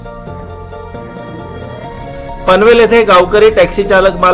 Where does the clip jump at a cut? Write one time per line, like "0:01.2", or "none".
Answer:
0:01.2